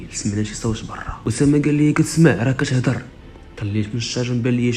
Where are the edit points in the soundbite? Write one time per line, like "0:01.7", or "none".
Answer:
0:01.2